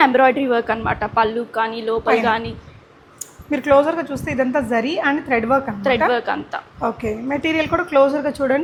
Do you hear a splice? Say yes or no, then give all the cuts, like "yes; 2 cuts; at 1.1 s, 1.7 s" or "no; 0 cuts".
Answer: no; 0 cuts